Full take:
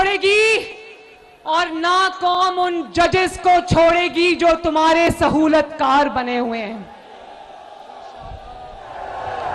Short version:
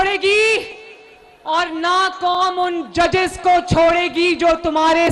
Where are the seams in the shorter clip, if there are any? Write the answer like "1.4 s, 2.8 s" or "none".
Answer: none